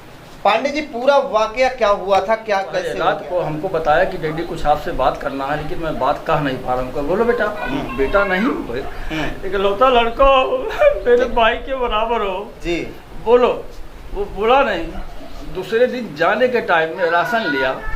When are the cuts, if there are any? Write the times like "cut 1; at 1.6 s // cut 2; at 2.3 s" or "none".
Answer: cut 1; at 3.0 s